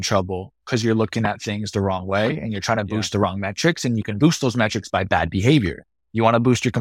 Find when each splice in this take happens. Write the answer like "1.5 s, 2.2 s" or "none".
none